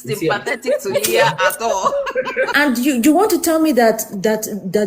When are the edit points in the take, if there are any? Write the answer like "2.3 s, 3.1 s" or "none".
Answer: 2.5 s

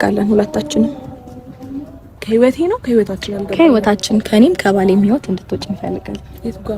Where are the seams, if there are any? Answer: 2.2 s

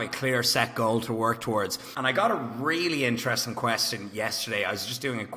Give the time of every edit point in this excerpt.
1.8 s

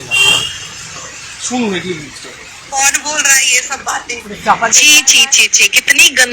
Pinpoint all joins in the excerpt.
2.5 s

